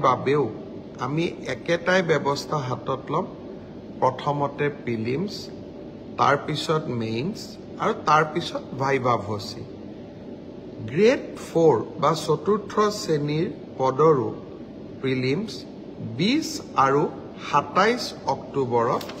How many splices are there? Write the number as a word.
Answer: zero